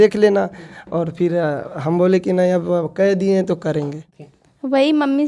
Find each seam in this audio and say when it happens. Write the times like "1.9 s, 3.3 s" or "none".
4.0 s

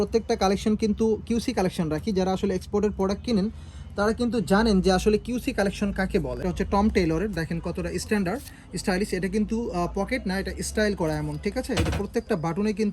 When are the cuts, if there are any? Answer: 6.5 s

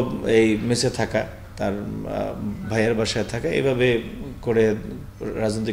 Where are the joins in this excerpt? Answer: none

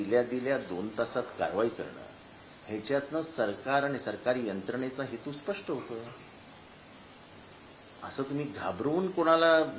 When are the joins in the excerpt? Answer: none

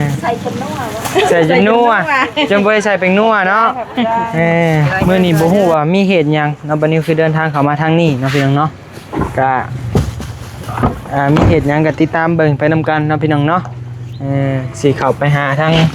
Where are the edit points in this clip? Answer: 4.9 s

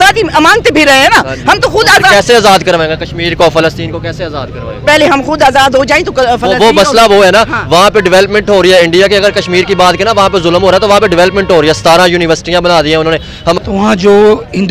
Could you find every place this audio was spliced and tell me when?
13.2 s

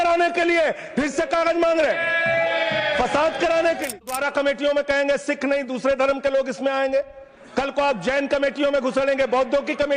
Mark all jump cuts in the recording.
4.1 s

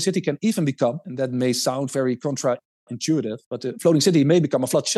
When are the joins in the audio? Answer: none

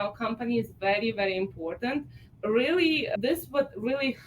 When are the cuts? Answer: 2.2 s, 3.1 s

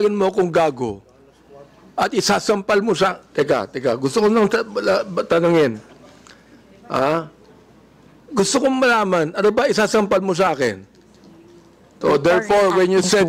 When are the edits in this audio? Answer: 12.0 s

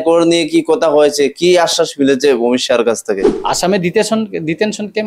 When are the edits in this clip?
3.3 s

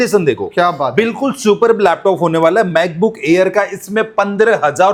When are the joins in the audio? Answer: none

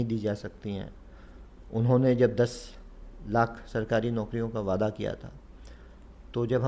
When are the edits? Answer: none

